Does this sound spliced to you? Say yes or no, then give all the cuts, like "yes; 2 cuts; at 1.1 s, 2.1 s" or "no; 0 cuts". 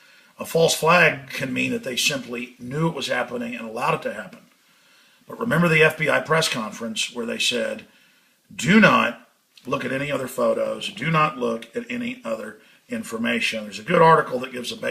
yes; 1 cut; at 1.2 s